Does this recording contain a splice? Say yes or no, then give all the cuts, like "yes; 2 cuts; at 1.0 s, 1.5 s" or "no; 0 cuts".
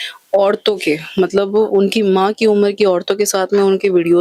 no; 0 cuts